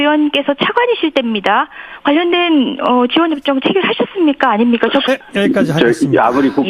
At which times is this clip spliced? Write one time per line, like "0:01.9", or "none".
0:04.8